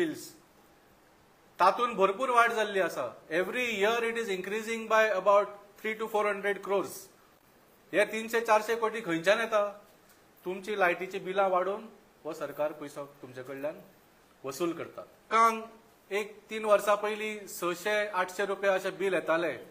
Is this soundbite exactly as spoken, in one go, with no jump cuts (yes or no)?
no